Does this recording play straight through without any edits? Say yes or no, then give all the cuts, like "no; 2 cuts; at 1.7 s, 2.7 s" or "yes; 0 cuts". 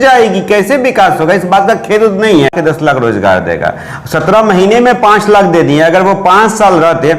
no; 1 cut; at 2.5 s